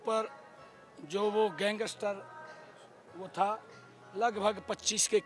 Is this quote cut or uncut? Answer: uncut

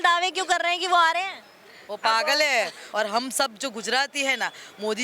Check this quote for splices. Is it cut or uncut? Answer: cut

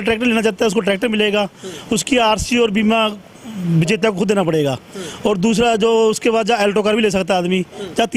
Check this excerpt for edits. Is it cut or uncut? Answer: uncut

